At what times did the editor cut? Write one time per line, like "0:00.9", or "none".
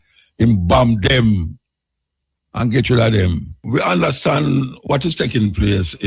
0:03.5